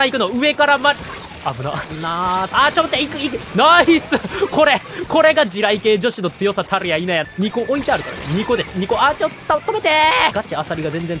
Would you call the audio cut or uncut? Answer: cut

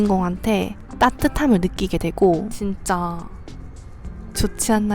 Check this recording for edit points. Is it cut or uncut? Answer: cut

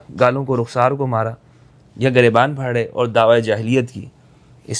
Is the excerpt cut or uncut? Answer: uncut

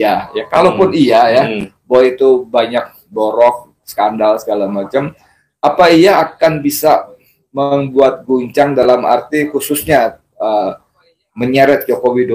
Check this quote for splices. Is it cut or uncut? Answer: uncut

